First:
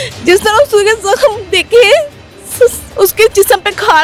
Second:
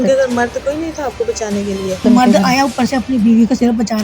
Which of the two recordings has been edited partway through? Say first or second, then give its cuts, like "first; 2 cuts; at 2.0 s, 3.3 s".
second; 1 cut; at 2.0 s